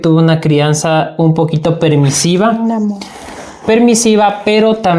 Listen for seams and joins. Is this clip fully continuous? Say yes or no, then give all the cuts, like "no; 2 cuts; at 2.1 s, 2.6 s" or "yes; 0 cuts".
yes; 0 cuts